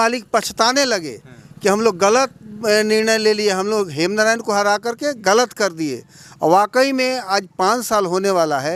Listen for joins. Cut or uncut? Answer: uncut